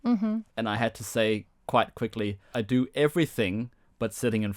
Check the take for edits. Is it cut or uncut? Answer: cut